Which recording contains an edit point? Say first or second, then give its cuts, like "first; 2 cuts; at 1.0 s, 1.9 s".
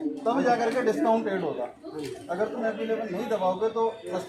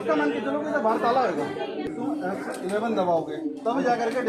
second; 1 cut; at 1.9 s